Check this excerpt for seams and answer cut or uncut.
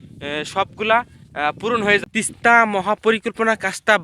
cut